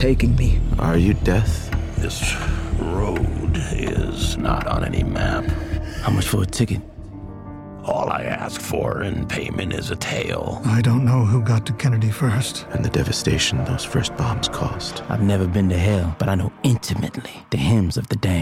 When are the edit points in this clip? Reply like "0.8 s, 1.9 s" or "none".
none